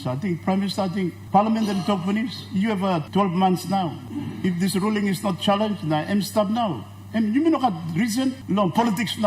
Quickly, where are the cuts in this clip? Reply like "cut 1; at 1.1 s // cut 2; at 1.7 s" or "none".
cut 1; at 1.2 s // cut 2; at 3.0 s // cut 3; at 4.0 s // cut 4; at 8.4 s